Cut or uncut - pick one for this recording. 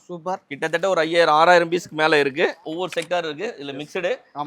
cut